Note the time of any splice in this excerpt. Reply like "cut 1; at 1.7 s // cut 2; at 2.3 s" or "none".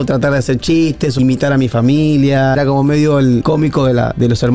cut 1; at 1.2 s // cut 2; at 2.6 s // cut 3; at 3.4 s

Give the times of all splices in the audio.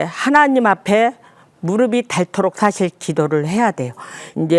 none

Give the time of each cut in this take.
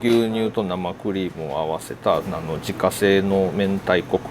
cut 1; at 2.3 s

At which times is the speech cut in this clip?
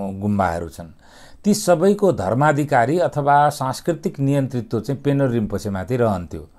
none

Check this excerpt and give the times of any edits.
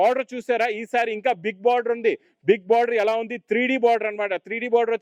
none

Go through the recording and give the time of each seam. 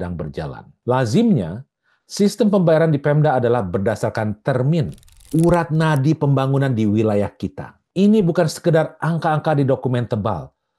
cut 1; at 5.1 s

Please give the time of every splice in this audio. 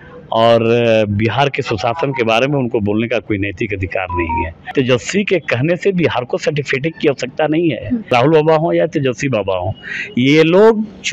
cut 1; at 4.7 s // cut 2; at 8.1 s

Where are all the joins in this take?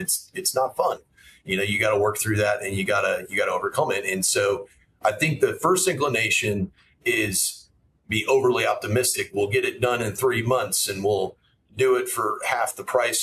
none

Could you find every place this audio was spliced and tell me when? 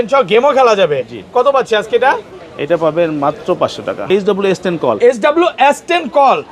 cut 1; at 4.1 s

